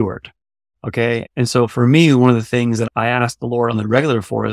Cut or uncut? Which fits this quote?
cut